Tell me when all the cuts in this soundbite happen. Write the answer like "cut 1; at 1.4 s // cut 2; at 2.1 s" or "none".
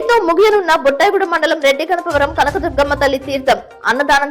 none